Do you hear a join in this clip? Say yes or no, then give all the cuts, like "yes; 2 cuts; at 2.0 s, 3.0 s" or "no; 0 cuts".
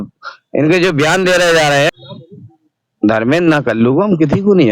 yes; 1 cut; at 2.0 s